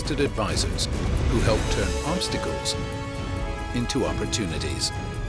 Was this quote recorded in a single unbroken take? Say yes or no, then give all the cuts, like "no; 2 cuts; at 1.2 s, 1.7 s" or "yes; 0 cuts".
yes; 0 cuts